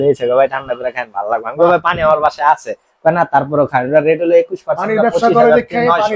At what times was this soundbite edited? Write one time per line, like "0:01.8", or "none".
none

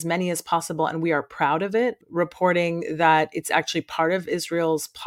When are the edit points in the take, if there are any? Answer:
0:02.0

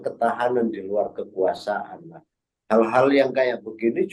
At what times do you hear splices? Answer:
none

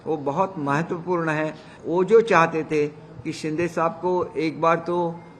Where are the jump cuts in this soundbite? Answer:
0:01.7

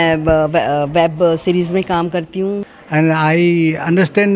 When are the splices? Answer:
0:02.7

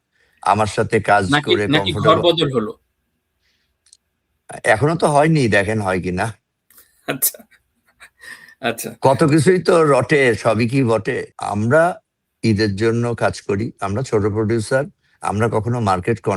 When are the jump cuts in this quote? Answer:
0:11.3

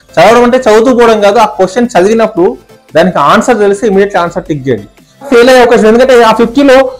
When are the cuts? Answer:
0:05.3

